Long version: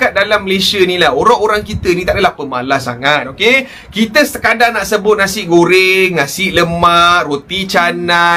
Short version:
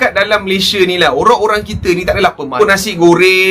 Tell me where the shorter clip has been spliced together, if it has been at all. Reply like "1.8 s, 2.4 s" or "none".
2.6 s